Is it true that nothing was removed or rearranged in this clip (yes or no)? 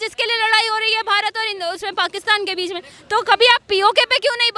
yes